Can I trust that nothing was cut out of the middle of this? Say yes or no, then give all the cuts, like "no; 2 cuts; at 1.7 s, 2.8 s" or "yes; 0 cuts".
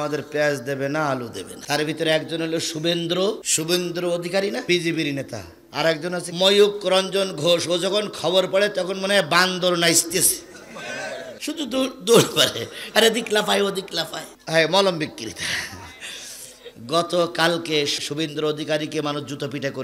no; 1 cut; at 6.3 s